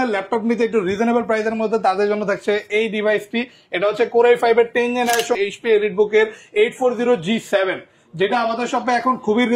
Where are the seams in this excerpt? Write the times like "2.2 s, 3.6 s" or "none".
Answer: 5.4 s